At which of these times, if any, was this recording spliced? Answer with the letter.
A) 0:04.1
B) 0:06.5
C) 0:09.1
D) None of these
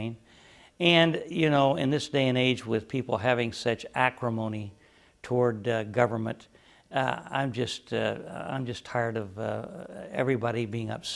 C